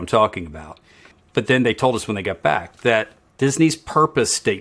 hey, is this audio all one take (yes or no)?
no